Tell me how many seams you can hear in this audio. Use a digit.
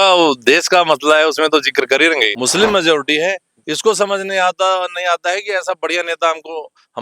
1